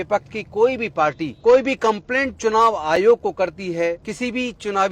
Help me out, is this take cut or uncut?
cut